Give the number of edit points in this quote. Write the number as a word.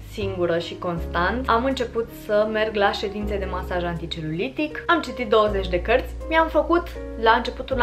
three